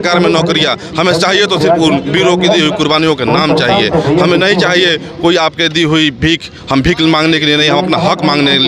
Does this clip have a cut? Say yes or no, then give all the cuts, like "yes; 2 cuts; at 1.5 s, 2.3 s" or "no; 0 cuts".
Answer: no; 0 cuts